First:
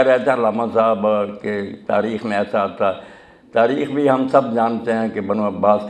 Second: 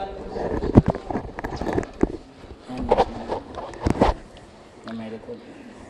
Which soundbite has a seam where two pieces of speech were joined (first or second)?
first